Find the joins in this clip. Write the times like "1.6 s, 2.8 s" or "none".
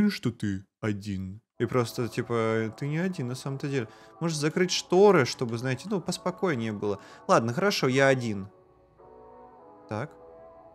none